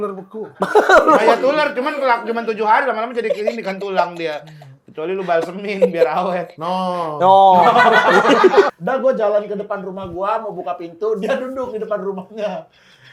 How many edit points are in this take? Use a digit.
1